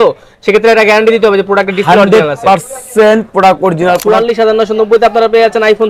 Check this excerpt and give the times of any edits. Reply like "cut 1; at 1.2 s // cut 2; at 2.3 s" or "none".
cut 1; at 4.0 s